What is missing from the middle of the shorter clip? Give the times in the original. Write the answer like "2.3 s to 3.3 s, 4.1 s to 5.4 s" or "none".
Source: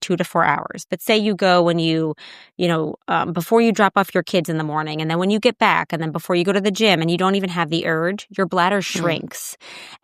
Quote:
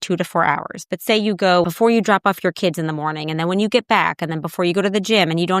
1.6 s to 3.3 s